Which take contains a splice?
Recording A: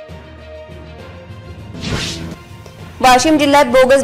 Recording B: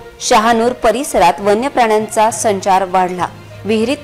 A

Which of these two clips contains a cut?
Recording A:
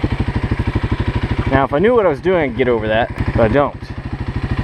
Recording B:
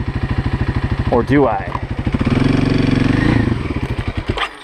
A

